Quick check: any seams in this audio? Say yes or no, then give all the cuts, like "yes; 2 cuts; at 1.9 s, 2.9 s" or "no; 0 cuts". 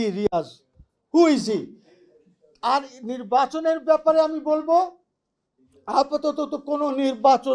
no; 0 cuts